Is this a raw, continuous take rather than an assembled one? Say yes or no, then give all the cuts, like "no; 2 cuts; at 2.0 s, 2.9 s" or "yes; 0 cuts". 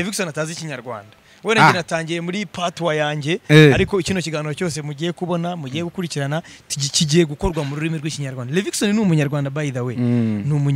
yes; 0 cuts